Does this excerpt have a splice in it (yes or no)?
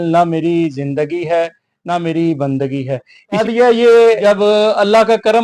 yes